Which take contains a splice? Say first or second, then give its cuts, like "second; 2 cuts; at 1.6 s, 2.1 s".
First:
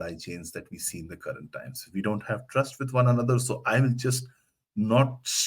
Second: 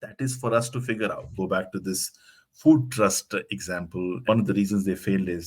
second; 2 cuts; at 1.3 s, 4.3 s